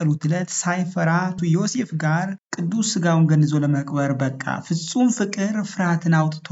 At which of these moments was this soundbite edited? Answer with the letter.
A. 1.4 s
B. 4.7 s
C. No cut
A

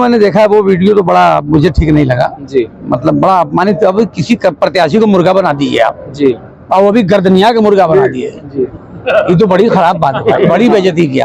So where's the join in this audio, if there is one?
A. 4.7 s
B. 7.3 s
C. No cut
C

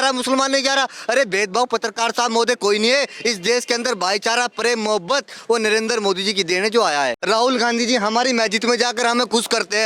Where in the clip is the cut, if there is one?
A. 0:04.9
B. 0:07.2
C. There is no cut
B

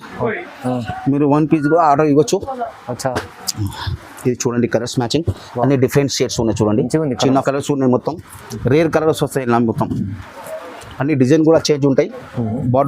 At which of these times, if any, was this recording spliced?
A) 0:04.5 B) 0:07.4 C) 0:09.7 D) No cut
B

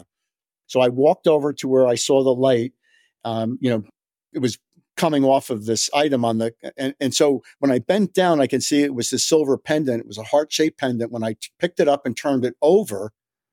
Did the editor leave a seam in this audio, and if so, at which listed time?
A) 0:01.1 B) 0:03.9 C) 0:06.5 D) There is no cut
B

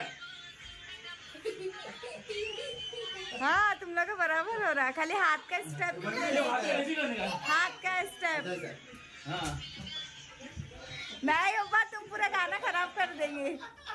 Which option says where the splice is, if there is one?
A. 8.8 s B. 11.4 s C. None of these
C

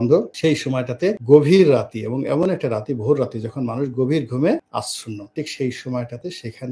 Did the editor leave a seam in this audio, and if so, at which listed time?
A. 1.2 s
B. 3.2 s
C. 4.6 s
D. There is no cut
D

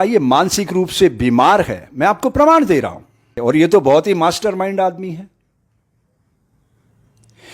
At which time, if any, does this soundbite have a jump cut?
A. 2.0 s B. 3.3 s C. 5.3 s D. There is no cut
B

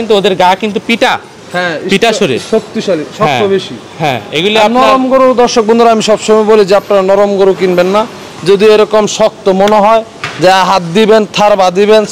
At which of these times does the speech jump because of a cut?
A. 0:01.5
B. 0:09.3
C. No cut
C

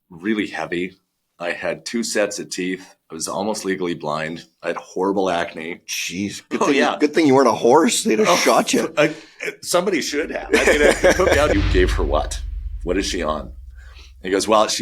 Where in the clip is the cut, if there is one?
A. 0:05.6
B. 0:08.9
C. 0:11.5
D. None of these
C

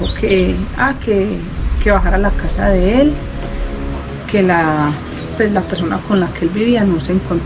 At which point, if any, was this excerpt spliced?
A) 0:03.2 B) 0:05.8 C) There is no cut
C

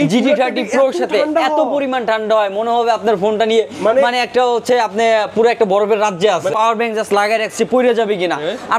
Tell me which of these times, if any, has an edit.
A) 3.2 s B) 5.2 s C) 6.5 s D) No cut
C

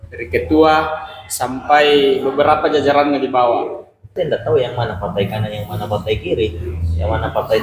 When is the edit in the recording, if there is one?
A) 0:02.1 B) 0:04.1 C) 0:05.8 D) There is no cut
B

